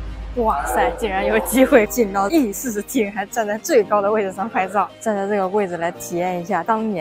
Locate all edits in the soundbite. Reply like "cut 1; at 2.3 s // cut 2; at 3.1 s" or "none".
cut 1; at 2.3 s // cut 2; at 4.9 s